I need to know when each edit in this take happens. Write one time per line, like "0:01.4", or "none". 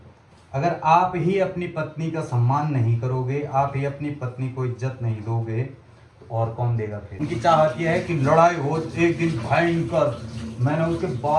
0:07.1